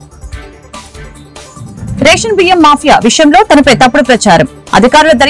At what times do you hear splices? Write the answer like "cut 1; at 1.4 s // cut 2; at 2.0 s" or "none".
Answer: none